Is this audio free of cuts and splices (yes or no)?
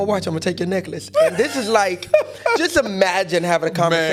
yes